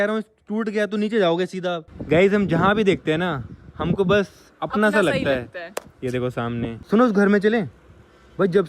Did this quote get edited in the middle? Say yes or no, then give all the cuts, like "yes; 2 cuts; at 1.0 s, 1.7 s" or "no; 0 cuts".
yes; 2 cuts; at 1.9 s, 6.8 s